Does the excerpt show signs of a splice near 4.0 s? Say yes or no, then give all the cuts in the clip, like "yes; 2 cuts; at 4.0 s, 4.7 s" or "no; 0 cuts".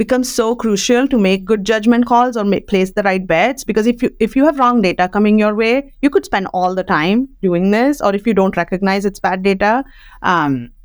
no; 0 cuts